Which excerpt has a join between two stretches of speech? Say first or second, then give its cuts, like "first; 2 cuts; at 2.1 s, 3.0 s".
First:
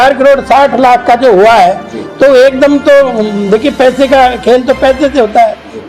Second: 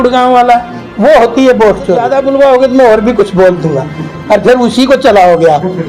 second; 1 cut; at 2.1 s